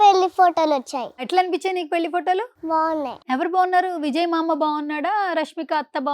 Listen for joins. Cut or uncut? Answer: cut